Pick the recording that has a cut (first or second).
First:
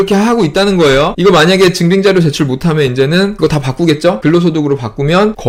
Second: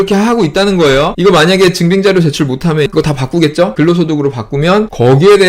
second